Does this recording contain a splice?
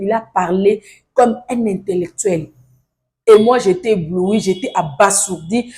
no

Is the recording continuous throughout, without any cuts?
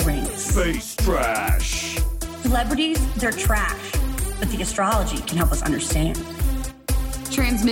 yes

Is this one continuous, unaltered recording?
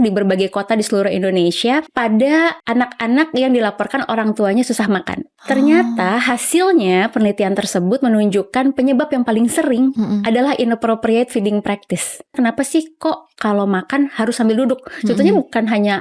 no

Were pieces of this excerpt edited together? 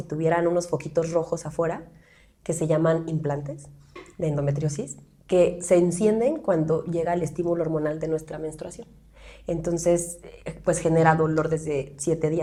no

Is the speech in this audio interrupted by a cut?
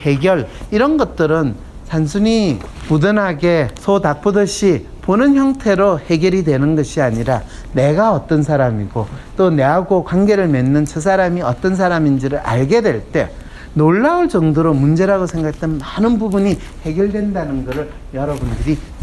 yes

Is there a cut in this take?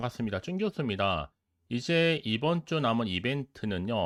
no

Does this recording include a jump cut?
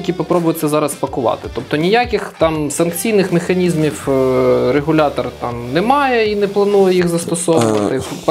no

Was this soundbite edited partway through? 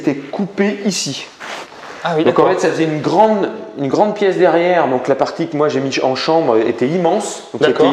no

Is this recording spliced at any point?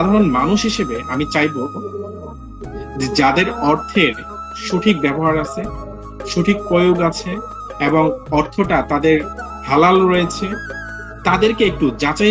no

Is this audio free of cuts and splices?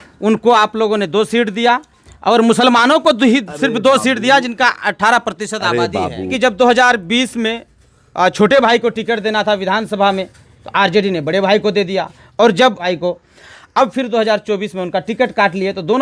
no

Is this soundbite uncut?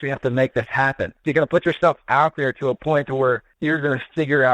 no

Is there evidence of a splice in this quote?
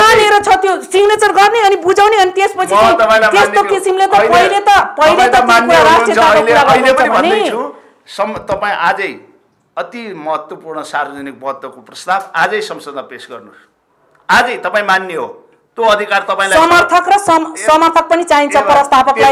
no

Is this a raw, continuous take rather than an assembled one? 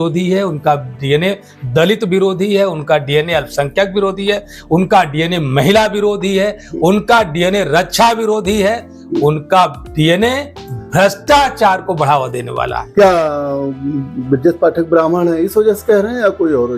yes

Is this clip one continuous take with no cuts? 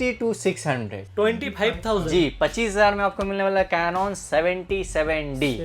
no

